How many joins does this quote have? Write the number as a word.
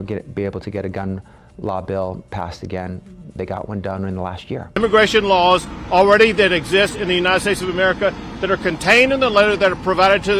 one